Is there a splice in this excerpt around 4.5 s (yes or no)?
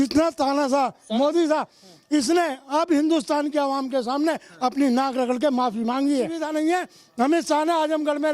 no